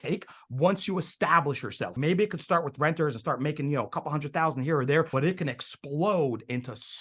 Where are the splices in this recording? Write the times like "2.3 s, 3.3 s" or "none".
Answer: 1.9 s, 5.1 s